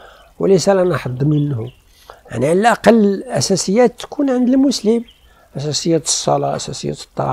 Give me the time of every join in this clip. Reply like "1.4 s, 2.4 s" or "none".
none

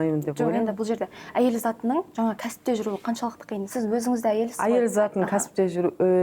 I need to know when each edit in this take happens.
none

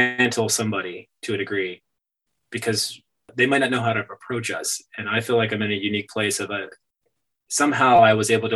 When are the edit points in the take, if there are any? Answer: 3.3 s

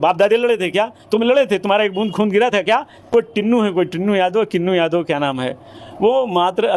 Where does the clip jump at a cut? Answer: 3.1 s

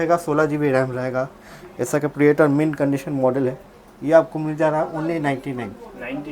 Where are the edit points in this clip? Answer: none

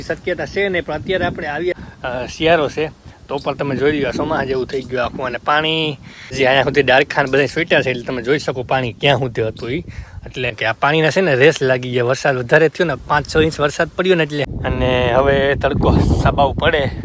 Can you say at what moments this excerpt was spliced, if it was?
1.7 s, 6.2 s, 10.5 s, 14.4 s

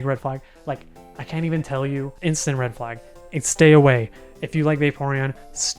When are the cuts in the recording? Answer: 2.1 s

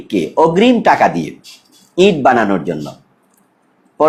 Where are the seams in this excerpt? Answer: none

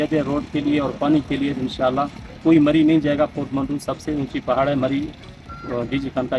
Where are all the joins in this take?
none

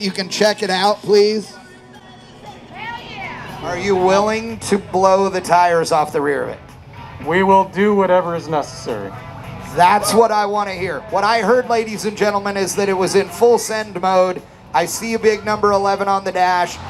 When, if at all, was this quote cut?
3.6 s

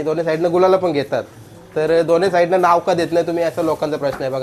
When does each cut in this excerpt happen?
none

